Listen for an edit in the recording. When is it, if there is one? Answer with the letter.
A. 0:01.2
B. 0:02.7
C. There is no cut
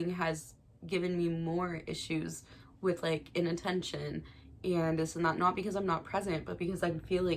C